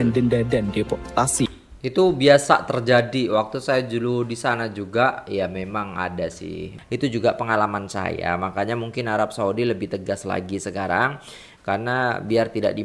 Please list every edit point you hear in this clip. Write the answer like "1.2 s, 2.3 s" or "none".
6.7 s